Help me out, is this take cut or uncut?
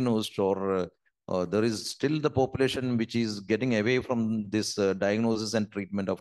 uncut